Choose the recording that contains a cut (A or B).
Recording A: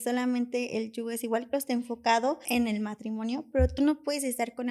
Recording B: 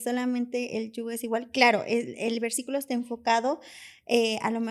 A